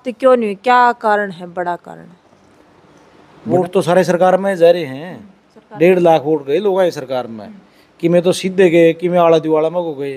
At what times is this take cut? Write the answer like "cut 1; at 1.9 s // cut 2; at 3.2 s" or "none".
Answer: cut 1; at 3.5 s

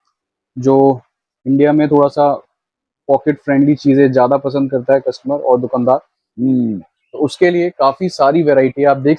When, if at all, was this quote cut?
none

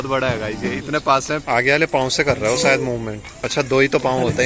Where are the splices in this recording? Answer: cut 1; at 1.4 s // cut 2; at 3.4 s

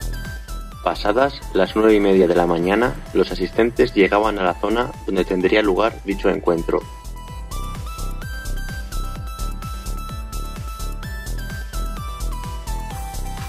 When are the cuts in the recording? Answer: cut 1; at 9.9 s

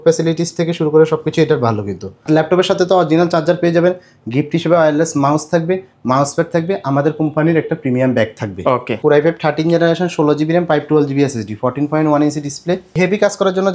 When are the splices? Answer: cut 1; at 2.2 s // cut 2; at 9.0 s // cut 3; at 12.9 s

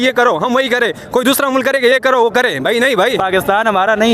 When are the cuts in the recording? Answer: cut 1; at 3.2 s

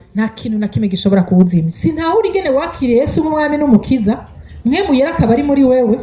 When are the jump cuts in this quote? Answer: cut 1; at 1.7 s

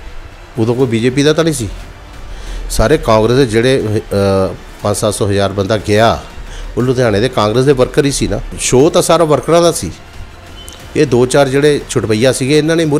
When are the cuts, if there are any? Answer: cut 1; at 8.5 s

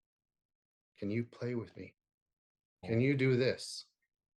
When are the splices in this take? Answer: cut 1; at 2.8 s

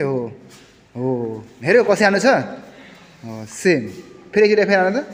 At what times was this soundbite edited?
none

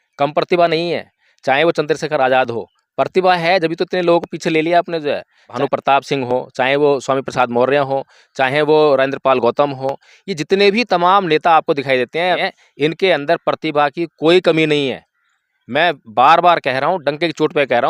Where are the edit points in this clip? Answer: cut 1; at 5.5 s // cut 2; at 12.4 s

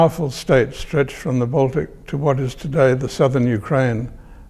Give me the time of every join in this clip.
none

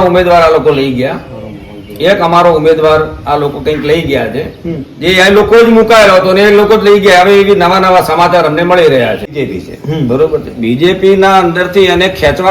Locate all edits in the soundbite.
cut 1; at 9.3 s

